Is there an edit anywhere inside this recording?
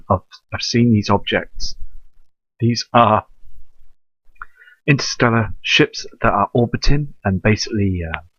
yes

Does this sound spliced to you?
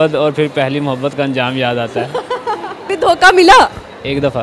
yes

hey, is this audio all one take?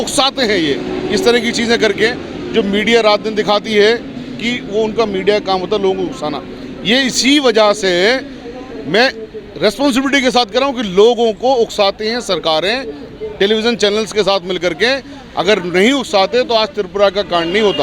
yes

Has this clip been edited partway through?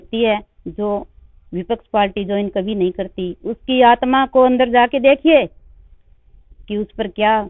no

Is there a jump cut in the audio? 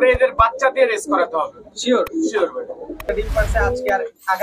yes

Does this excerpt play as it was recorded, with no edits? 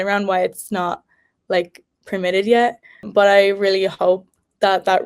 no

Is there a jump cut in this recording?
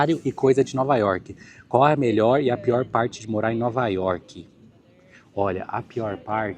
no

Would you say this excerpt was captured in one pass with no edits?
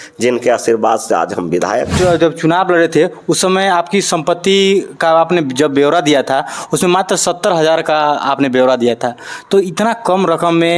no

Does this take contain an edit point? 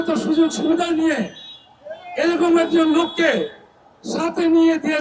no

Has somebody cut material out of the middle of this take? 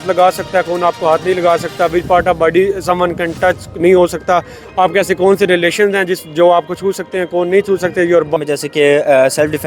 yes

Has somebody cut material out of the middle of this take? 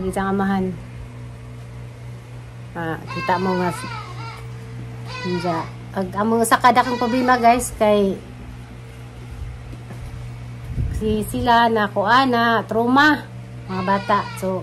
no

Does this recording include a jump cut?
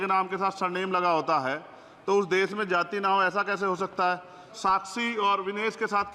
yes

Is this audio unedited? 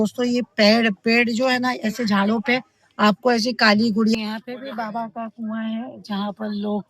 no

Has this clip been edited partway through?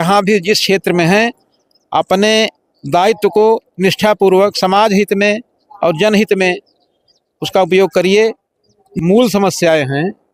yes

